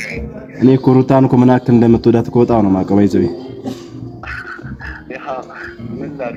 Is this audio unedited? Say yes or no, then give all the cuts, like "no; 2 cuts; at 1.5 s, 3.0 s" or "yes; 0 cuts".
yes; 0 cuts